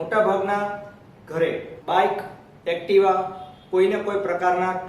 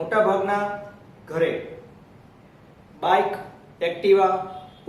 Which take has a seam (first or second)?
first